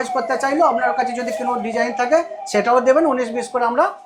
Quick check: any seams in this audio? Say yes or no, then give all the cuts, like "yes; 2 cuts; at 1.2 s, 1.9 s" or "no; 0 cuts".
no; 0 cuts